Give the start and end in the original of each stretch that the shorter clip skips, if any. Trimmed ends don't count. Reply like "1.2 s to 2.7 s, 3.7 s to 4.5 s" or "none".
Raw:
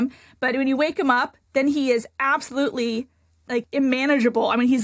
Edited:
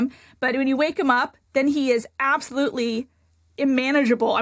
3.5 s to 3.6 s